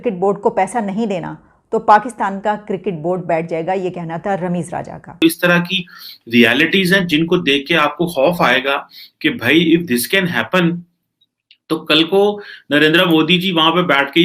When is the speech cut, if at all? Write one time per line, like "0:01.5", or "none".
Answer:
0:05.2